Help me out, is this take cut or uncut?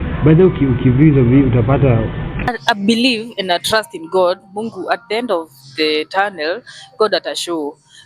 cut